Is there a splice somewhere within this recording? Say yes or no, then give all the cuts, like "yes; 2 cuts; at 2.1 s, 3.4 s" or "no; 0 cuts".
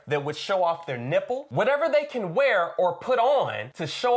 yes; 1 cut; at 1.5 s